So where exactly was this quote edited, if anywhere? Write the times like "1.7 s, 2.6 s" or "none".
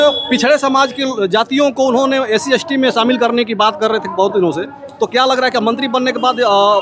none